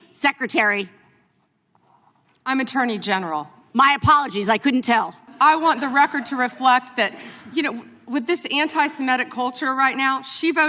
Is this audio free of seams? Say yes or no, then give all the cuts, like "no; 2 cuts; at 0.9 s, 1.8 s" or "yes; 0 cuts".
no; 1 cut; at 5.3 s